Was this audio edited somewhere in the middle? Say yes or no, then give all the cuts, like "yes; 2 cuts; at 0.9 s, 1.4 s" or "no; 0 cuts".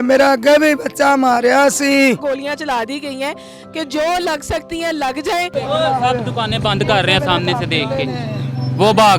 yes; 2 cuts; at 2.2 s, 5.5 s